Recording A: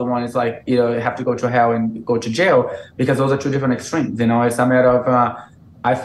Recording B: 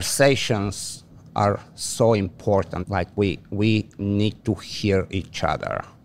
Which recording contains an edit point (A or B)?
B